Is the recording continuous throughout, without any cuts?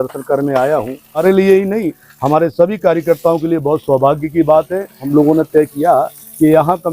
no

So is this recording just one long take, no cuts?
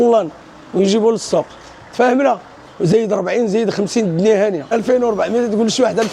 no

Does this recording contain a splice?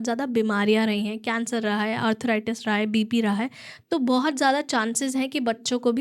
no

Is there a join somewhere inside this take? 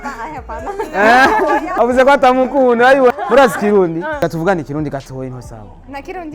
yes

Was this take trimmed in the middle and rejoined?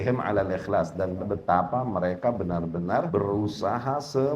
yes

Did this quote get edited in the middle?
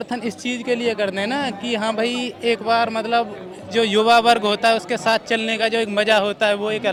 no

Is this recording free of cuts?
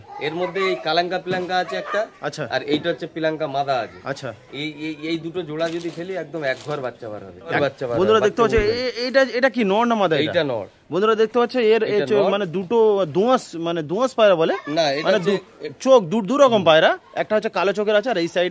yes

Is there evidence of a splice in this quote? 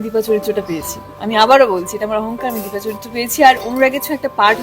no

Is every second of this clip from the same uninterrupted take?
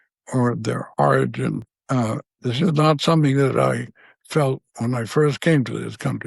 no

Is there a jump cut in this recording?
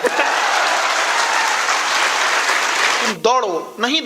yes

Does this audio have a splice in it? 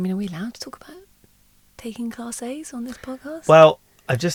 no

